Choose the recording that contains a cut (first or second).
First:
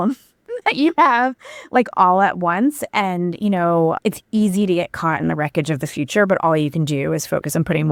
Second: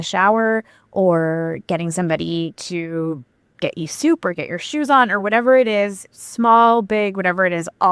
second